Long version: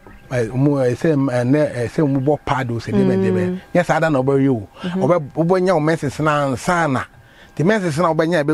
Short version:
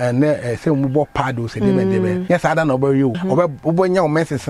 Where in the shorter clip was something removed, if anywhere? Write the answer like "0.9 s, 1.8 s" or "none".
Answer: 2.2 s, 3.2 s